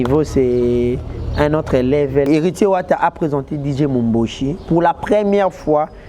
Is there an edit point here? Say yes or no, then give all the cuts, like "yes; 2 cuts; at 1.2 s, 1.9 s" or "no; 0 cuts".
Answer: yes; 1 cut; at 2.3 s